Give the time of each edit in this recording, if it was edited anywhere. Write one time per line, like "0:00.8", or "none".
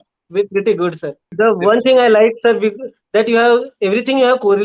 0:01.2